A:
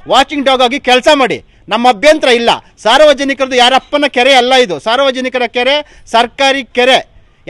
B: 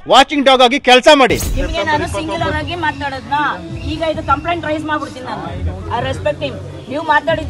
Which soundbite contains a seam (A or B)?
B